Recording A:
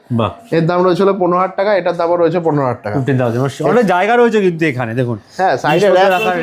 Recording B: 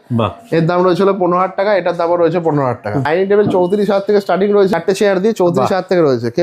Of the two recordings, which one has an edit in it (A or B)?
B